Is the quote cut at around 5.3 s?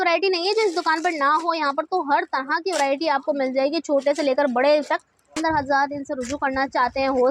yes; 1 cut; at 5.3 s

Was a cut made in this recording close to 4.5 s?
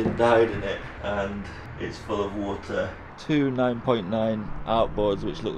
no; 3 cuts; at 0.9 s, 1.6 s, 3.1 s

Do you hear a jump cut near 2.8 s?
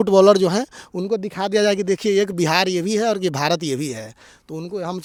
no; 0 cuts

